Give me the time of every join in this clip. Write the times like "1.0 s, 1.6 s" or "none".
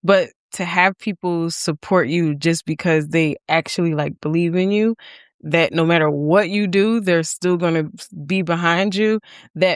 none